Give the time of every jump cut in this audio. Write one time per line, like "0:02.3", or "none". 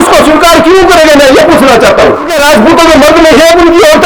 0:02.3